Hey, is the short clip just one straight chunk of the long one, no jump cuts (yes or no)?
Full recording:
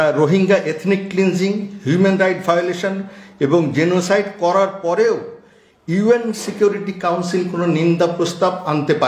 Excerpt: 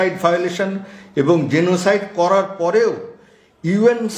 yes